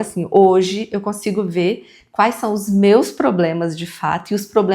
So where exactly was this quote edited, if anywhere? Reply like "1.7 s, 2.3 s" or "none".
none